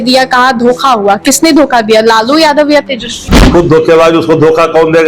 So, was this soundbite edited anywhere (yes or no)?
yes